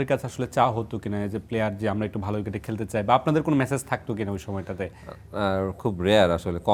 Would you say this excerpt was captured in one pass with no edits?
yes; 0 cuts

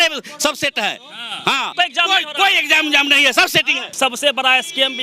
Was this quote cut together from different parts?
yes; 2 cuts; at 1.7 s, 3.9 s

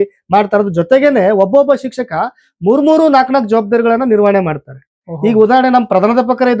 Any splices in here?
no; 0 cuts

